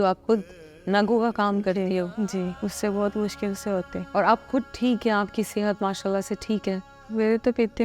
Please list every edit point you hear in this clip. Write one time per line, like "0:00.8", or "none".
0:02.5
0:04.0